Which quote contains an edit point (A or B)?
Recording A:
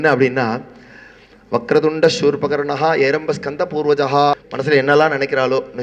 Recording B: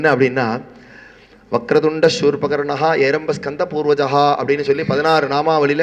A